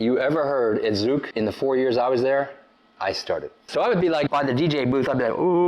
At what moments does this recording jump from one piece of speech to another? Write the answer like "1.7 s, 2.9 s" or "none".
1.3 s, 3.6 s, 4.3 s